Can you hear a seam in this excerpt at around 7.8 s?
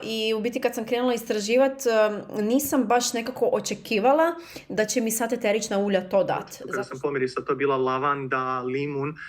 no; 1 cut; at 6.6 s

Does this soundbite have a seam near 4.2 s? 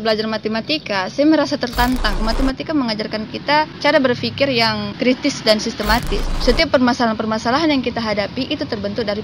no; 2 cuts; at 2.2 s, 6.2 s

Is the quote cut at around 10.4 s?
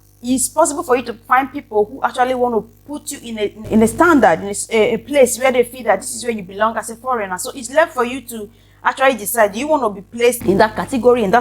yes; 2 cuts; at 3.7 s, 10.4 s

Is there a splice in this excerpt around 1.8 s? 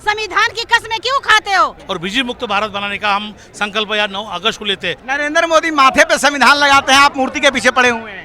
yes; 2 cuts; at 1.8 s, 5.0 s

